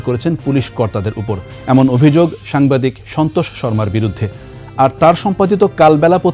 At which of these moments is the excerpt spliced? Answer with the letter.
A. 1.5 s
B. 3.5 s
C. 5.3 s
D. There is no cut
A